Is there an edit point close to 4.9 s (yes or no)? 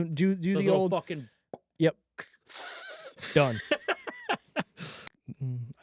yes